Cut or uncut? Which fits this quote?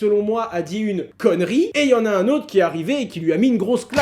cut